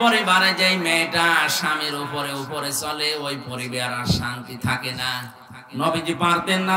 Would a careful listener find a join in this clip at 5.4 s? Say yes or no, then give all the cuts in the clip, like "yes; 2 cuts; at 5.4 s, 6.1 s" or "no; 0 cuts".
yes; 1 cut; at 5.4 s